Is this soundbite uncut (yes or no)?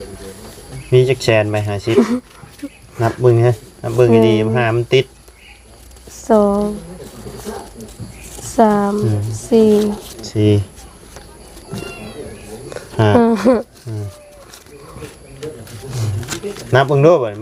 yes